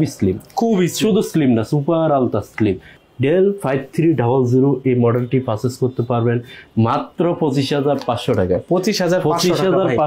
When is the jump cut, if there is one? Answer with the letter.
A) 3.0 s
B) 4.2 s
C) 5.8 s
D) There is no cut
A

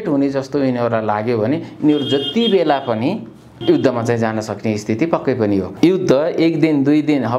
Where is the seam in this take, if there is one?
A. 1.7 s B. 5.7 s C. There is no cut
B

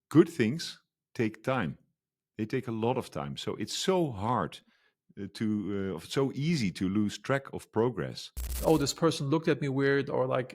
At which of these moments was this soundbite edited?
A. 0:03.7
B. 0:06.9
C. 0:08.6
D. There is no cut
C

